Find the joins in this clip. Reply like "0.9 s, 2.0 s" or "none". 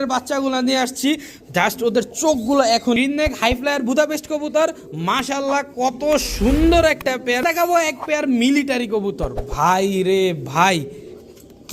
3.0 s, 7.4 s